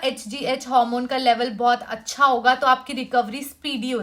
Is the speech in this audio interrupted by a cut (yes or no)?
no